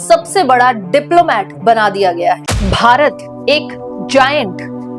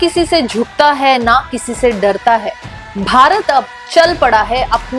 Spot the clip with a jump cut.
first; 1 cut; at 2.4 s

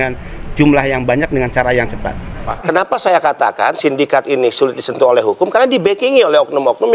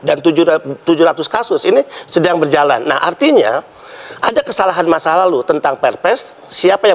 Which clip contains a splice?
first; 1 cut; at 2.4 s

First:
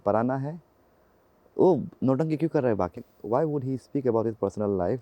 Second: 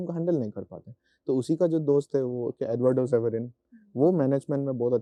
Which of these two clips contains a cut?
first; 1 cut; at 3.1 s

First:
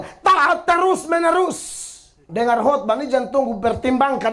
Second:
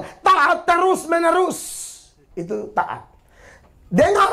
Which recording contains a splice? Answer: first; 1 cut; at 2.2 s

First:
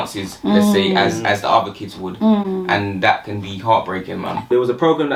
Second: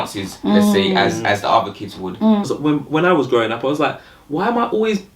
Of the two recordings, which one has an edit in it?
second; 1 cut; at 2.5 s

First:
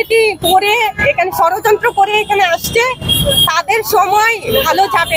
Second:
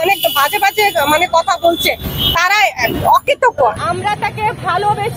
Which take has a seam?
second; 1 cut; at 3.8 s

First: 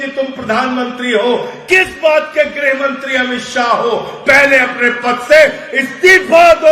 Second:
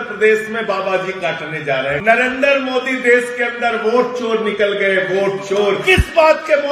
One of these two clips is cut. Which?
second; 2 cuts; at 2.0 s, 5.8 s

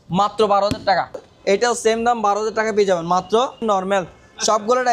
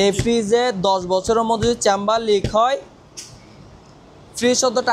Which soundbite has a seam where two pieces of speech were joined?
first; 2 cuts; at 1.2 s, 3.6 s

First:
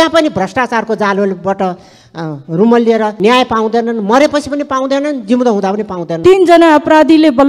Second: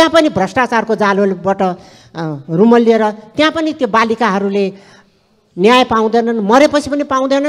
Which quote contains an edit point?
first; 2 cuts; at 3.1 s, 6.0 s

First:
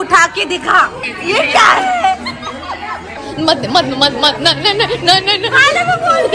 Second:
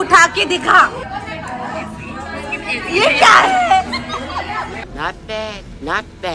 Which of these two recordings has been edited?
first; 2 cuts; at 1.0 s, 3.1 s

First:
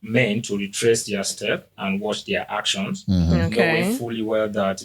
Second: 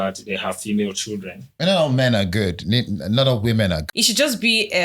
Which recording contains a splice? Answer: second; 2 cuts; at 1.5 s, 3.8 s

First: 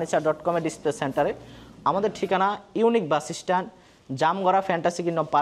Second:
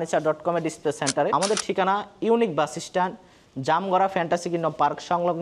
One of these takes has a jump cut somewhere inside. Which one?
second; 1 cut; at 1.3 s

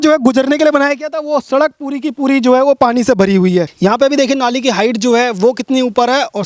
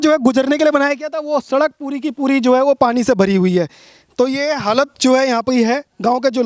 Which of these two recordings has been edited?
first; 1 cut; at 3.7 s

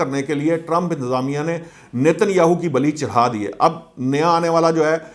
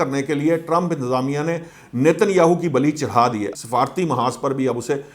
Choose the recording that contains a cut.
second; 1 cut; at 3.5 s

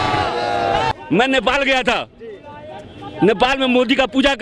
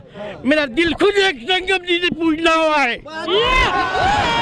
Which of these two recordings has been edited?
first; 1 cut; at 0.9 s

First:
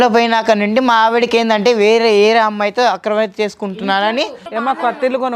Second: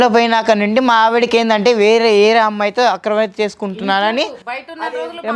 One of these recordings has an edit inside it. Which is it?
first; 1 cut; at 4.4 s

